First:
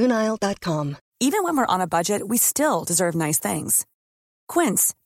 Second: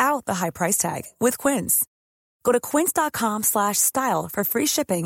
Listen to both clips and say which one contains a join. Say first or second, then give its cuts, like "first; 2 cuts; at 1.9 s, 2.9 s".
first; 1 cut; at 1.0 s